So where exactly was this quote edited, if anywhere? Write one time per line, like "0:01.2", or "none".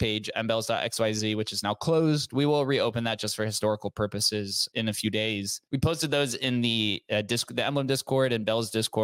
0:04.7
0:05.6